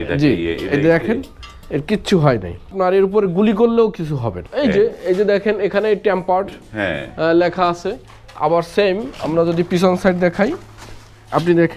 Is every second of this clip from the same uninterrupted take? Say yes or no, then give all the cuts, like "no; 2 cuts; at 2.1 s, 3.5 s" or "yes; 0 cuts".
no; 2 cuts; at 2.7 s, 4.4 s